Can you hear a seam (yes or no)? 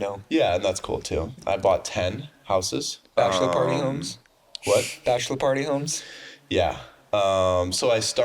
yes